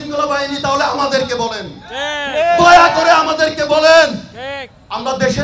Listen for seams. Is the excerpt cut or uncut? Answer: uncut